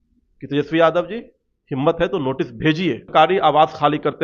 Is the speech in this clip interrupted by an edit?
yes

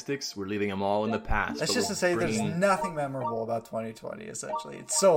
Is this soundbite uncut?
yes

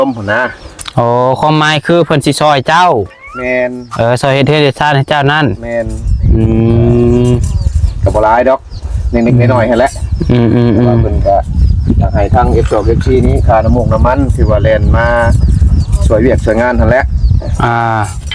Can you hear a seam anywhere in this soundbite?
no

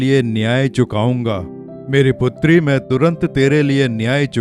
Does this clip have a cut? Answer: no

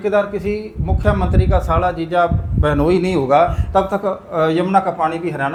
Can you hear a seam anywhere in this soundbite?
no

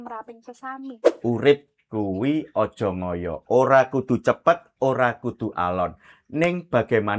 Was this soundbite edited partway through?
yes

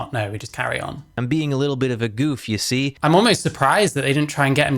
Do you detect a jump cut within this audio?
yes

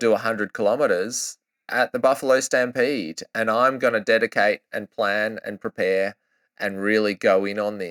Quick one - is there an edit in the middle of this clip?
no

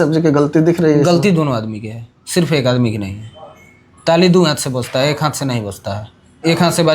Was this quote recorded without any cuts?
yes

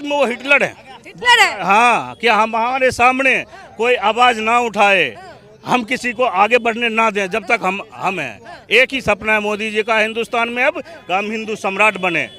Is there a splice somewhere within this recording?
no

